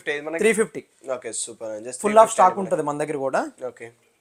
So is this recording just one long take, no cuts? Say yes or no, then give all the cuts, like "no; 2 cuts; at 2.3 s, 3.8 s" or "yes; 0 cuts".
yes; 0 cuts